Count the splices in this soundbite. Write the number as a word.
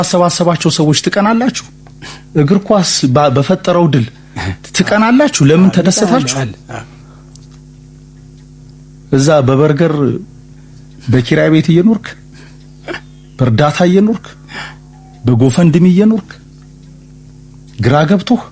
zero